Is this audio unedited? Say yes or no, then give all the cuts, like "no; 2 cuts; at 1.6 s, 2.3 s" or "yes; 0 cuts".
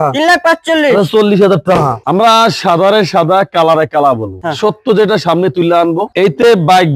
no; 2 cuts; at 2.0 s, 4.3 s